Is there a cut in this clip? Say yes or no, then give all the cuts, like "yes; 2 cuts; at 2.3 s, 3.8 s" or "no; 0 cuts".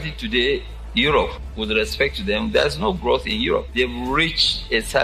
yes; 1 cut; at 3.7 s